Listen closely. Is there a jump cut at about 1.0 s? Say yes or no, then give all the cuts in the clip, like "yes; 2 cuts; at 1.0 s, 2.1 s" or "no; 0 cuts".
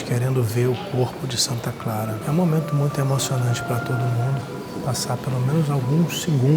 no; 2 cuts; at 2.2 s, 4.7 s